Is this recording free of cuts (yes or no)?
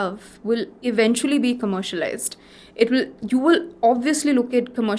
yes